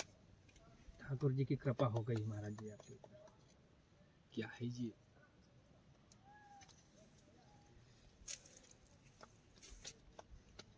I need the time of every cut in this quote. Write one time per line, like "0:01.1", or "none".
none